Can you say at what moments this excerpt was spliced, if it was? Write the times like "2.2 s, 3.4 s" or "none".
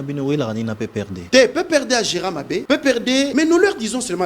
1.2 s, 2.6 s, 3.3 s